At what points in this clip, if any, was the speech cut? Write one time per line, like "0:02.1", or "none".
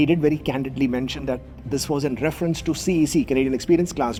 none

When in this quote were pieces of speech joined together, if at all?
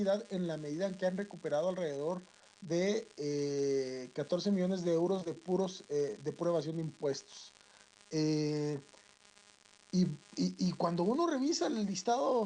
0:08.9

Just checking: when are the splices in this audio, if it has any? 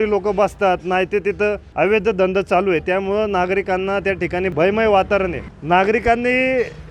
0:01.6
0:04.5
0:05.5

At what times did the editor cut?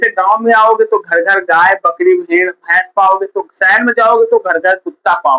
none

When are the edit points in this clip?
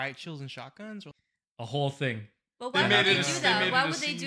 0:01.1

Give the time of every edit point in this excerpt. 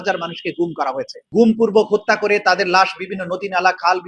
0:01.1

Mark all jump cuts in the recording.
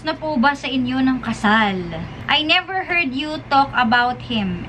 0:02.1

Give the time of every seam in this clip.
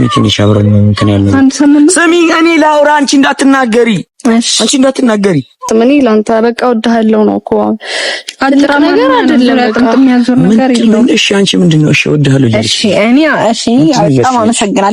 0:05.6

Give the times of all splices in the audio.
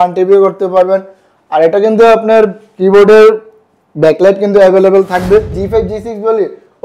0:05.6

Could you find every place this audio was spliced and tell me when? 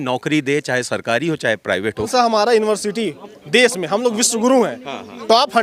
0:02.1

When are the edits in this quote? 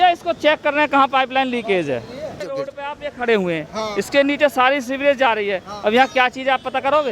0:02.4

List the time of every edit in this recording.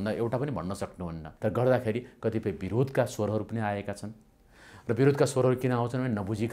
0:01.2

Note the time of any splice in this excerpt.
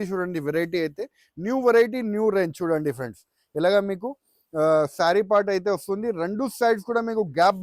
none

